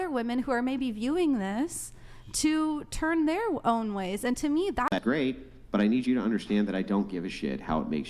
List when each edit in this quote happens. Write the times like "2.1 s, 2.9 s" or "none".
5.0 s